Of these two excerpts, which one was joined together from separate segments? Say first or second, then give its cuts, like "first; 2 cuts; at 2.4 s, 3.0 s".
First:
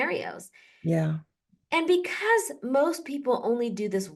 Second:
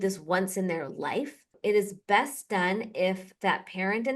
second; 1 cut; at 1.4 s